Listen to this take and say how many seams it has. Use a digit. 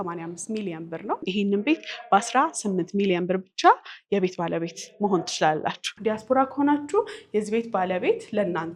2